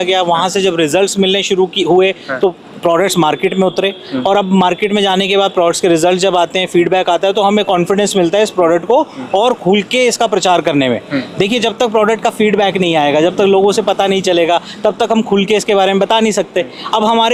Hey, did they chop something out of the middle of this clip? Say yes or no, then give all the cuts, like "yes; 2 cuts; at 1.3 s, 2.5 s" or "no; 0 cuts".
no; 0 cuts